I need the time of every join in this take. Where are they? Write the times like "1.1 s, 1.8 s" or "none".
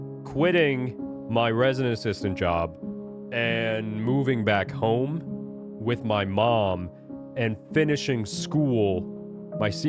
none